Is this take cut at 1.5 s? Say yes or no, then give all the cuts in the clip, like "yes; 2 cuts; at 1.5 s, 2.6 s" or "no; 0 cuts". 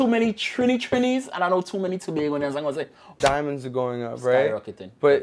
no; 1 cut; at 3.1 s